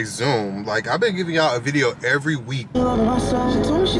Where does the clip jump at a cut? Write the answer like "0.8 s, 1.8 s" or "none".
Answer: 2.7 s